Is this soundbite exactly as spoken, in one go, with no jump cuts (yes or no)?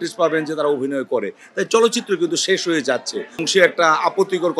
no